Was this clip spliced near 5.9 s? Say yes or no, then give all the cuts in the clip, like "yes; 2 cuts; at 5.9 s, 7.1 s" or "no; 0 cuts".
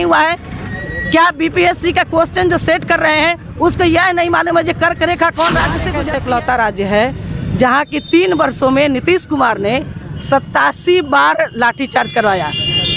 yes; 1 cut; at 5.9 s